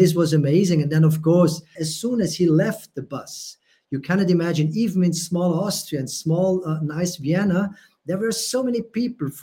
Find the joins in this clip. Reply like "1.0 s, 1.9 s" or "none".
1.8 s